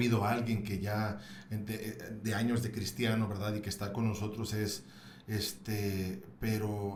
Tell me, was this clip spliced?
no; 0 cuts

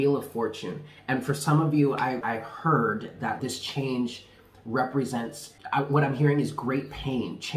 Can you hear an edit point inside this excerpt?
yes; 3 cuts; at 2.2 s, 3.4 s, 5.5 s

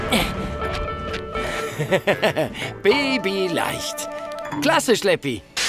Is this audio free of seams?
yes; 0 cuts

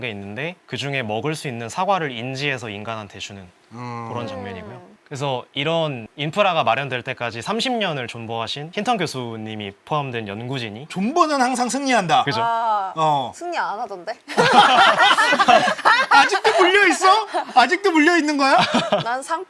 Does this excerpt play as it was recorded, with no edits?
no; 1 cut; at 4.9 s

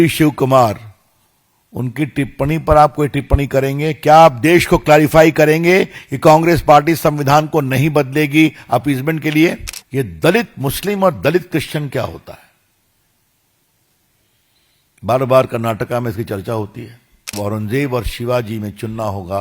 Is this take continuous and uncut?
no; 2 cuts; at 9.7 s, 17.3 s

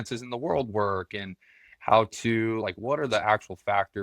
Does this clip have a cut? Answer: yes; 1 cut; at 2.6 s

